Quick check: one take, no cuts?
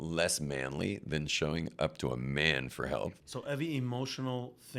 no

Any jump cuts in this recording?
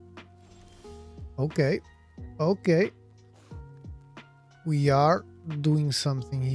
yes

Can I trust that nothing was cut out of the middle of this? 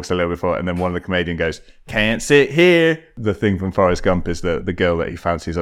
no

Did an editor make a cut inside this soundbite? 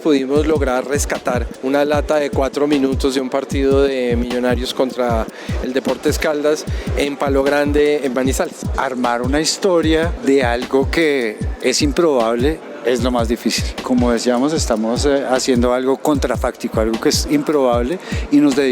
yes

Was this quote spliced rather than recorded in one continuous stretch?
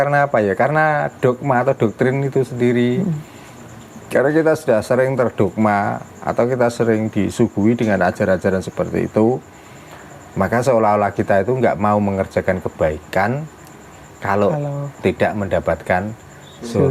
no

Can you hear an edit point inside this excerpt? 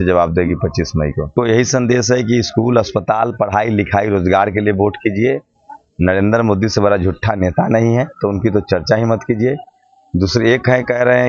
yes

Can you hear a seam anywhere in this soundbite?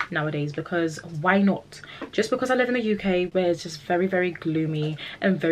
yes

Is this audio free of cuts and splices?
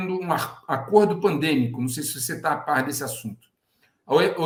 yes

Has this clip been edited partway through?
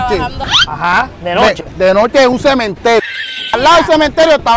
yes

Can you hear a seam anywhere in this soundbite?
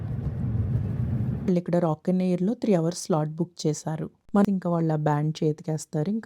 yes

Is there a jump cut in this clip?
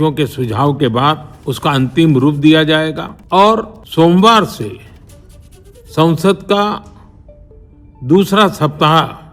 yes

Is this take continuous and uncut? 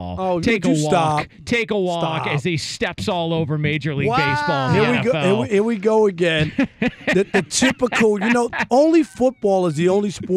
yes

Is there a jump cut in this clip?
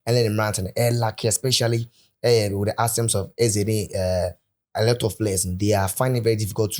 no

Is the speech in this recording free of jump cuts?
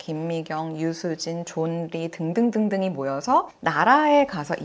yes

